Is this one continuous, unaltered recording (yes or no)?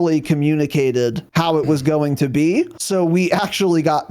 no